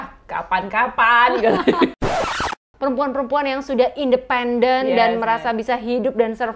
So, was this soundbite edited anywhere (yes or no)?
yes